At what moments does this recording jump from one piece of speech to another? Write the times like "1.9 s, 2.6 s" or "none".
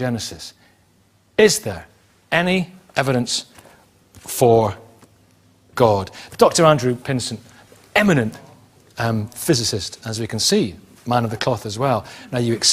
3.3 s